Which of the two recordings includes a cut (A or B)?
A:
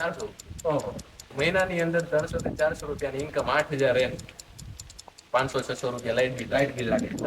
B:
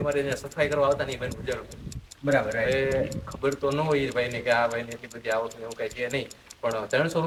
A